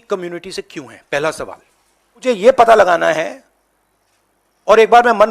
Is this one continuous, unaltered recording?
no; 1 cut; at 2.2 s

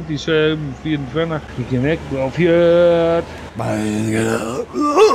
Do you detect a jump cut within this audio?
yes; 1 cut; at 1.5 s

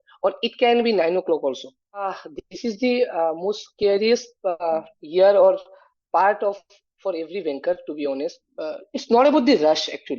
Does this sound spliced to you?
yes; 2 cuts; at 2.1 s, 8.4 s

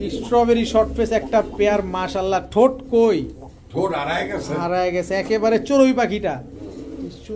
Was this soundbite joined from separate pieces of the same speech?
no; 0 cuts

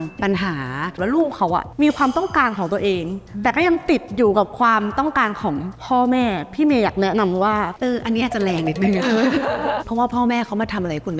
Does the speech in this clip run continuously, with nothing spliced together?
no; 3 cuts; at 1.0 s, 7.7 s, 9.8 s

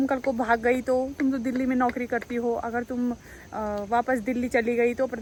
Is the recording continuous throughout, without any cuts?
yes; 0 cuts

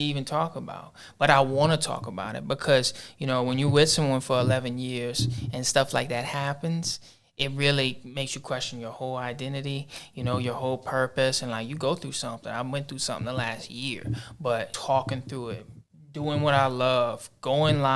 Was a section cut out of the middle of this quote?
yes; 1 cut; at 14.7 s

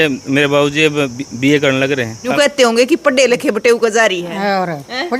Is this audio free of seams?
no; 1 cut; at 2.2 s

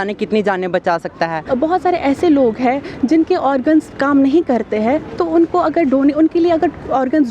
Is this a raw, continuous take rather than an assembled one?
no; 1 cut; at 1.4 s

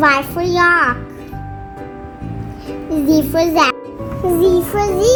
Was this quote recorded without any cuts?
yes; 0 cuts

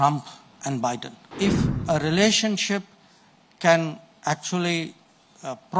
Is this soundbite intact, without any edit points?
no; 1 cut; at 1.3 s

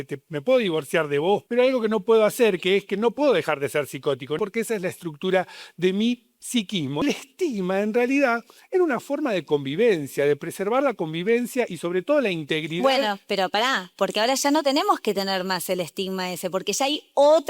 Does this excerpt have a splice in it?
yes; 3 cuts; at 1.4 s, 4.4 s, 7.0 s

